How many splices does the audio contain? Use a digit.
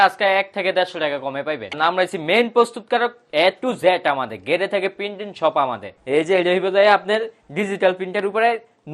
2